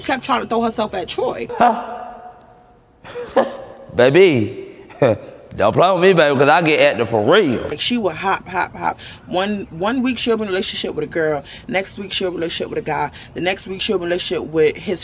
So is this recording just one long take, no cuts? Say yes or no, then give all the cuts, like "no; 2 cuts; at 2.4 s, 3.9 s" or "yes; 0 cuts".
no; 2 cuts; at 1.5 s, 7.8 s